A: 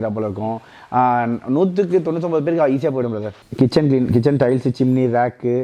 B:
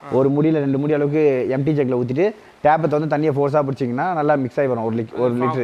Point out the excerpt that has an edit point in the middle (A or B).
A